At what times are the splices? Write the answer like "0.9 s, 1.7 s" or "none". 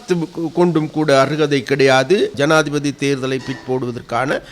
2.3 s